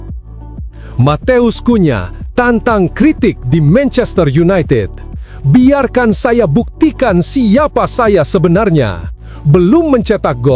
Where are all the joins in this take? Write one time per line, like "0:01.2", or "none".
0:00.9